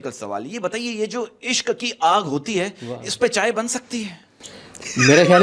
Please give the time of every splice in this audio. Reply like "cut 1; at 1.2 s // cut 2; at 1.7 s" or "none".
none